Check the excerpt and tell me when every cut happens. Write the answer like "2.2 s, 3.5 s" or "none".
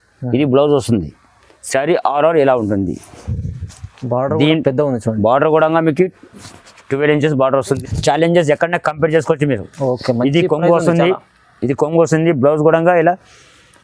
7.8 s